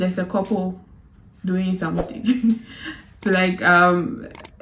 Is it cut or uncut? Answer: uncut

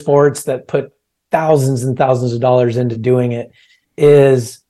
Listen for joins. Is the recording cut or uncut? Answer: uncut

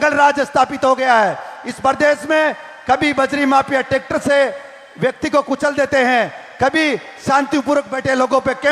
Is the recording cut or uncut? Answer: uncut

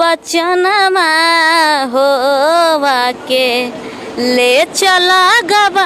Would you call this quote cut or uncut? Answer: uncut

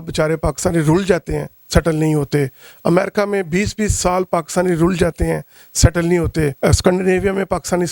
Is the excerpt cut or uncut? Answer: uncut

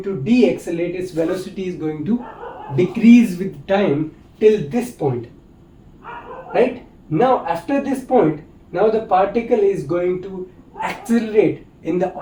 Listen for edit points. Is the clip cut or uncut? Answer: uncut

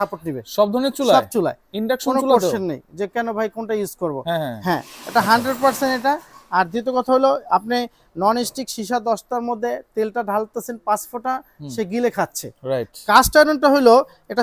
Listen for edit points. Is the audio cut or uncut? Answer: uncut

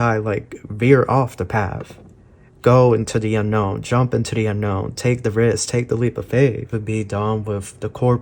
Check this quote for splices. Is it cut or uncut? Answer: cut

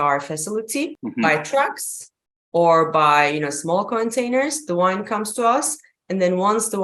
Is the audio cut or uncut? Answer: cut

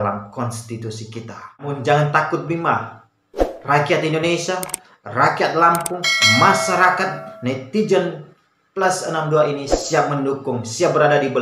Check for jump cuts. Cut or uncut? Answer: cut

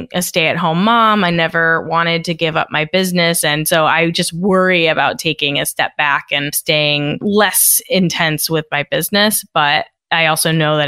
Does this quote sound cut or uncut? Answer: cut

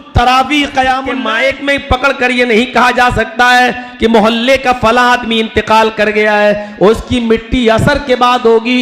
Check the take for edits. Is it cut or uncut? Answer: cut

